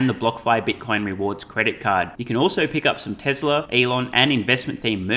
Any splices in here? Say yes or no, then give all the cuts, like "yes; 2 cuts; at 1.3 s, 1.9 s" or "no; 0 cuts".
yes; 1 cut; at 3.7 s